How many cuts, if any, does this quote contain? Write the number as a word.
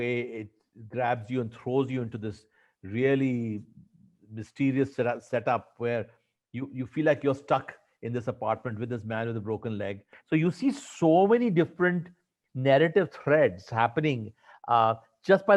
one